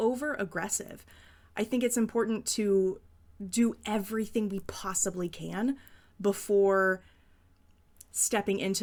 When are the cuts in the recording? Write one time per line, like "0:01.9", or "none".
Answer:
none

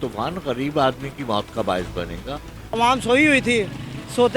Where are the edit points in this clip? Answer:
0:02.8

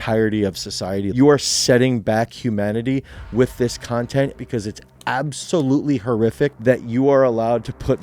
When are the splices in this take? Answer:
0:01.1
0:04.4
0:06.6

